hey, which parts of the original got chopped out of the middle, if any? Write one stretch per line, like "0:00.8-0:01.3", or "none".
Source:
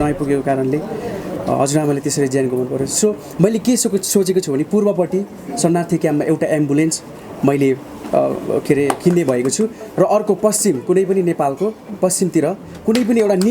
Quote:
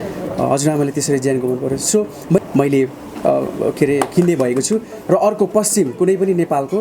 0:03.5-0:07.3